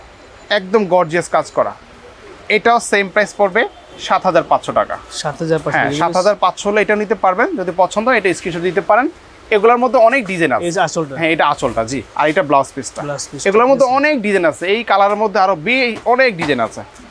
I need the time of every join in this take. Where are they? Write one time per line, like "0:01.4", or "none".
none